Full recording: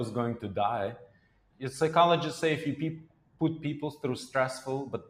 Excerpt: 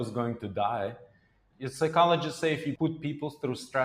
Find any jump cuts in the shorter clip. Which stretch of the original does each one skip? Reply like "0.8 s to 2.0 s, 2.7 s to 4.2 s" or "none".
2.8 s to 3.4 s